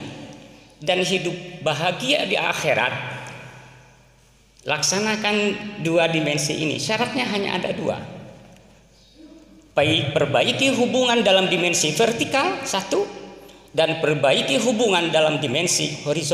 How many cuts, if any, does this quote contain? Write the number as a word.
zero